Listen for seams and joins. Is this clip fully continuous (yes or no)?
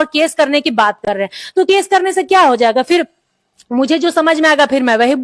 yes